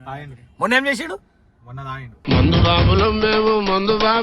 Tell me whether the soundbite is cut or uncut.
uncut